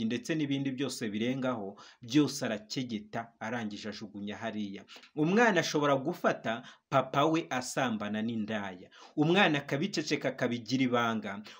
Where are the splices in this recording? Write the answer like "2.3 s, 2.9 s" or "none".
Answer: 4.9 s